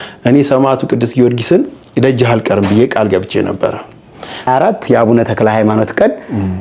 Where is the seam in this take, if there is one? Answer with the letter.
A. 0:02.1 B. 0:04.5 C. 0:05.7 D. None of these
B